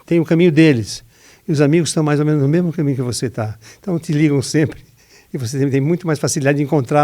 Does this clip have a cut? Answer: no; 0 cuts

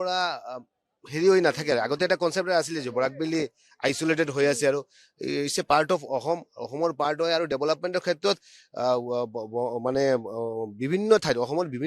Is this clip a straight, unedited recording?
yes; 0 cuts

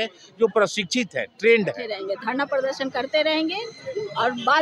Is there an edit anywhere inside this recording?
yes; 1 cut; at 1.9 s

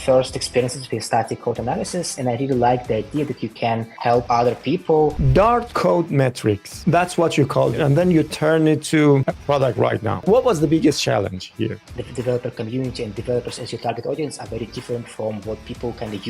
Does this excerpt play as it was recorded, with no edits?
no; 5 cuts; at 2.1 s, 5.1 s, 7.8 s, 9.6 s, 11.8 s

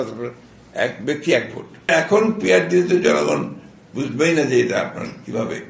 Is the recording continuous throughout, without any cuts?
no; 1 cut; at 1.9 s

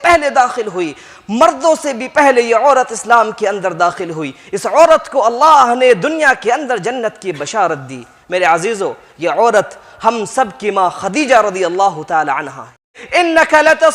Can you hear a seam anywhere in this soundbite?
yes; 1 cut; at 13.0 s

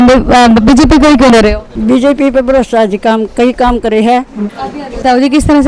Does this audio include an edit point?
yes; 2 cuts; at 1.3 s, 4.6 s

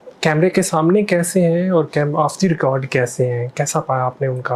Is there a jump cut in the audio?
no; 0 cuts

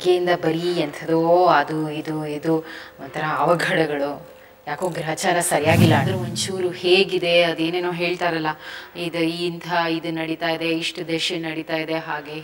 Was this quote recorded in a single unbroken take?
no; 1 cut; at 6.1 s

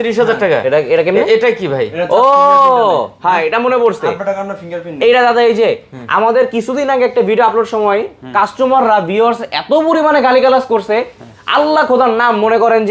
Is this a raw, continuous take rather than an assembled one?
yes; 0 cuts

